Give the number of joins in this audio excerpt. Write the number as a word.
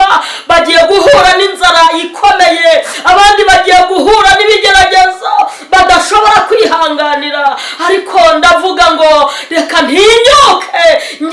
zero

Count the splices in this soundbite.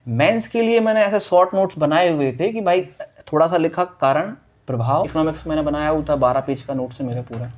one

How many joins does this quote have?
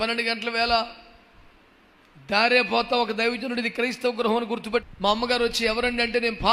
one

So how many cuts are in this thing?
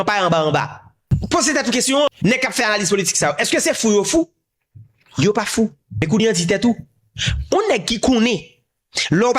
one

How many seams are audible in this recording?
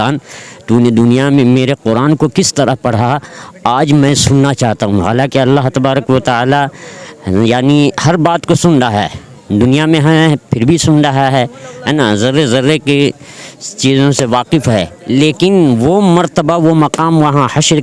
zero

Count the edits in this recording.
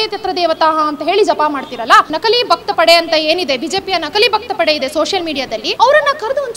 two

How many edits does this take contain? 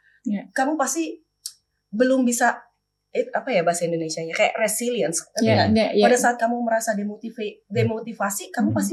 zero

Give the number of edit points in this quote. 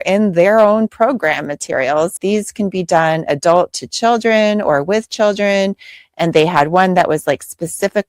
one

